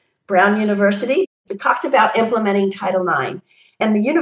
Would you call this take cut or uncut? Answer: cut